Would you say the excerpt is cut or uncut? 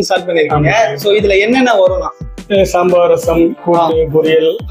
uncut